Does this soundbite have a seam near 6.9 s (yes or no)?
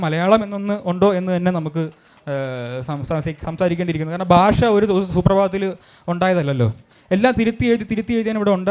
yes